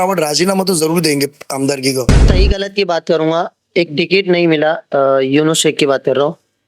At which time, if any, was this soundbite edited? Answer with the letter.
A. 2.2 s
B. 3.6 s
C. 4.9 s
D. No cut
A